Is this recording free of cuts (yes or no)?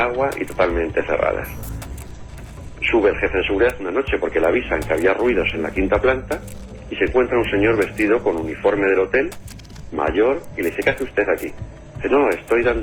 yes